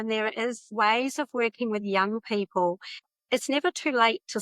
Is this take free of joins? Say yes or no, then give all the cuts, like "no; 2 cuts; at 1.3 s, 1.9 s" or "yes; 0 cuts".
no; 1 cut; at 3.0 s